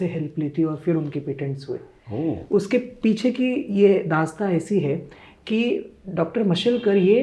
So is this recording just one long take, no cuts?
yes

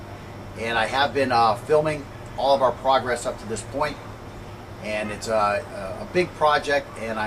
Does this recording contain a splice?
yes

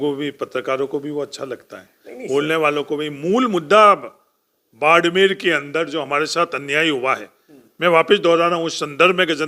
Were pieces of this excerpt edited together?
no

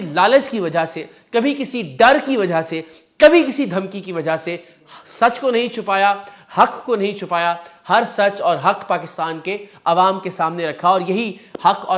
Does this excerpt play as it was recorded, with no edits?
yes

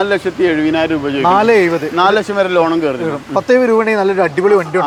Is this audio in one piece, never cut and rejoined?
yes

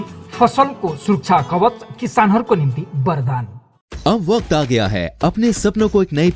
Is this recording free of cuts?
yes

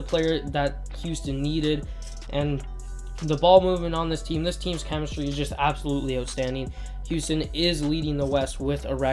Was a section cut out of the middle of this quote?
no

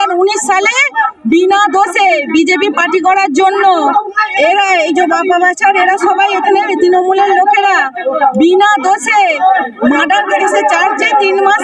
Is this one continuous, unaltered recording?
yes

